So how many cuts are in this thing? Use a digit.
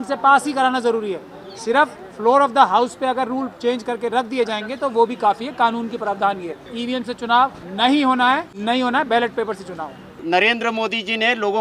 4